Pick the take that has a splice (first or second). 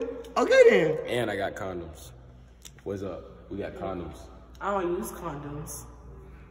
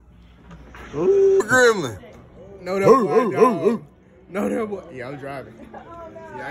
second